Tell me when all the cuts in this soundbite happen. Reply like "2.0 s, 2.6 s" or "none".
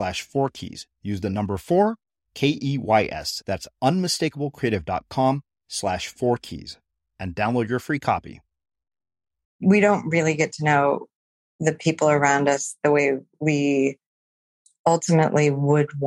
9.5 s